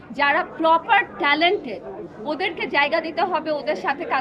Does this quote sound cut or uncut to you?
uncut